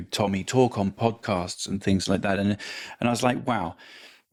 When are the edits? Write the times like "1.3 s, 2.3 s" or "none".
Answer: none